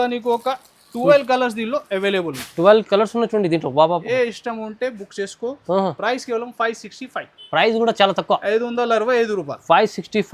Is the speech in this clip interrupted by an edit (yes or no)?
no